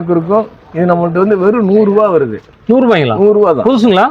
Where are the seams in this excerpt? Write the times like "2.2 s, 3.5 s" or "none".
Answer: none